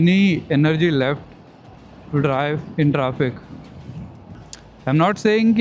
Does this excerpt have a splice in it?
no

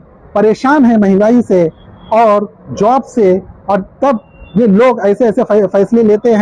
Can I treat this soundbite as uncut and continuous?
yes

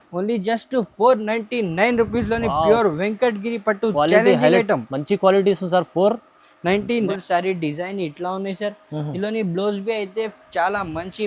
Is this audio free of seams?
no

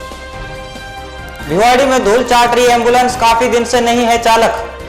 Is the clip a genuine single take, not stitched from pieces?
yes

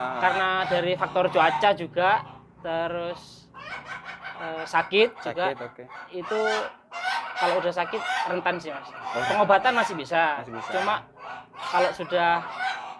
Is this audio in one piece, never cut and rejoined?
yes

